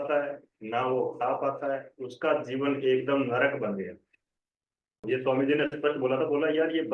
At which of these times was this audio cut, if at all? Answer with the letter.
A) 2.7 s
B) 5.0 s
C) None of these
B